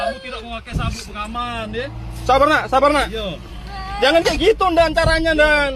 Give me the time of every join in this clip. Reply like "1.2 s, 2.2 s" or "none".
none

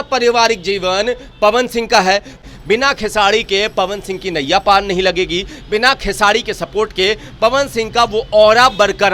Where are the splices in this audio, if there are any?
2.4 s

